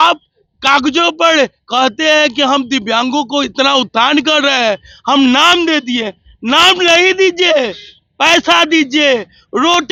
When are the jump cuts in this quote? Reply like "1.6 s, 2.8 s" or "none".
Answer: none